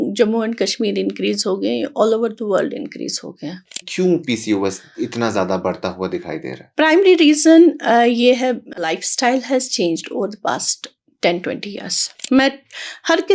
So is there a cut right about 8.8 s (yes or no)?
yes